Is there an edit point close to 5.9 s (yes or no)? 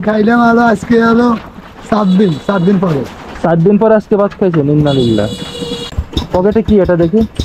yes